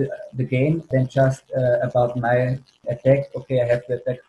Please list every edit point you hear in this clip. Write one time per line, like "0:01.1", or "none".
0:00.9
0:02.8

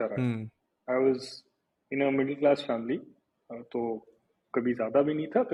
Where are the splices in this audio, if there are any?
none

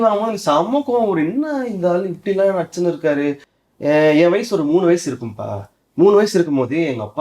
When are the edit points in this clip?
0:03.5

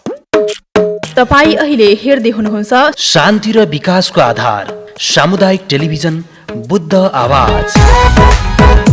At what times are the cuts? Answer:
0:01.0

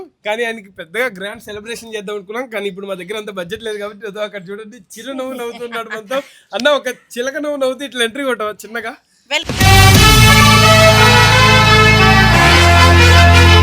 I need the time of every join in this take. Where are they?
0:09.4

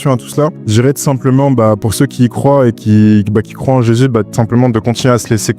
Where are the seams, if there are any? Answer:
none

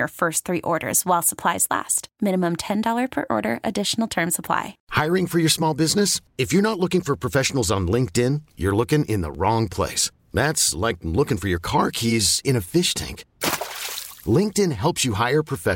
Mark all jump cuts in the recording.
0:04.8

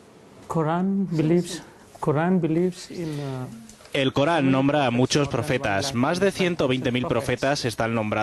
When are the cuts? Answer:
0:05.1

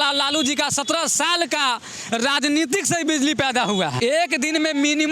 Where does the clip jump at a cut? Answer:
0:03.9

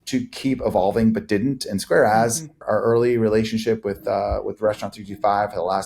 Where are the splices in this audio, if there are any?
0:02.6

